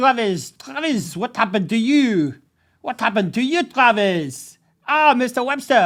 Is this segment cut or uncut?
uncut